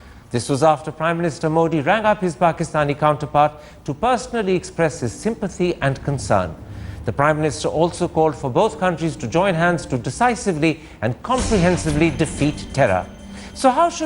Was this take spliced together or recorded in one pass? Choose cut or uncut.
cut